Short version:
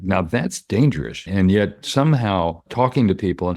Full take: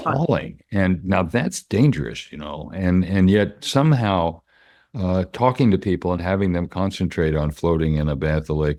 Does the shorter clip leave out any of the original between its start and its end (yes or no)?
yes